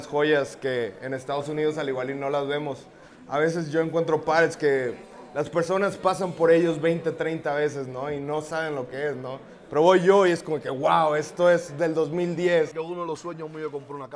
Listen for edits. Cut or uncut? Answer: cut